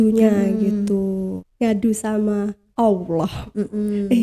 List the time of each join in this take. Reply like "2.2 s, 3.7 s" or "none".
1.4 s